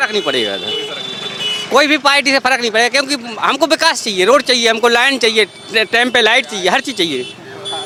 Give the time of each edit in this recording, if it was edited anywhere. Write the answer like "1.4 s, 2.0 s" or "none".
none